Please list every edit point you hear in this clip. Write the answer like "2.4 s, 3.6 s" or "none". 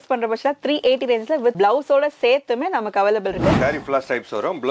1.5 s, 3.6 s